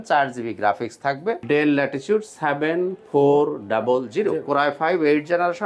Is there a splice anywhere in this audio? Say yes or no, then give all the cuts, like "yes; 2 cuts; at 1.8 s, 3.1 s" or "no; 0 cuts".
yes; 1 cut; at 1.4 s